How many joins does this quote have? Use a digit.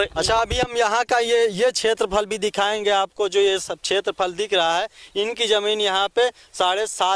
0